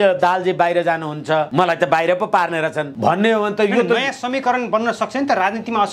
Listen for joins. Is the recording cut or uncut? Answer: cut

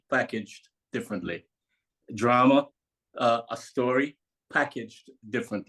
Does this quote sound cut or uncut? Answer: uncut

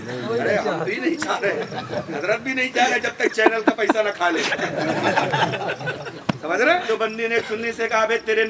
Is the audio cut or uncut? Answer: cut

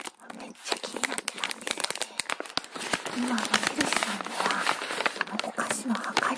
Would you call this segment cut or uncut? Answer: cut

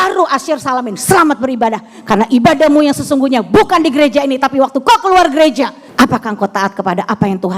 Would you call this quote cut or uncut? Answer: cut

